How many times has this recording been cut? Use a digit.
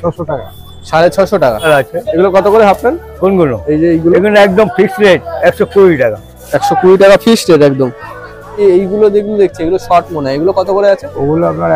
2